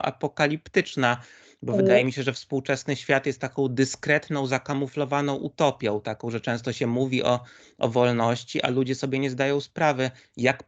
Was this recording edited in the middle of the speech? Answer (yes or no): no